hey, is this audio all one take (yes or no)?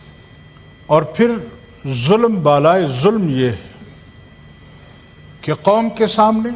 yes